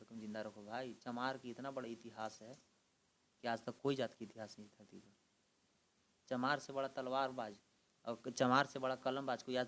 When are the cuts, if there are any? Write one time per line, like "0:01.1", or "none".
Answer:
none